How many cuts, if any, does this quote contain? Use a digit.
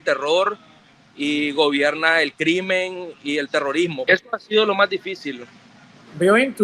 1